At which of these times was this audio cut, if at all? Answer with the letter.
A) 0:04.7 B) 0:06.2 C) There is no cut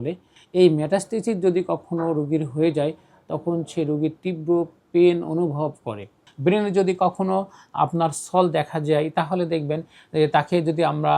B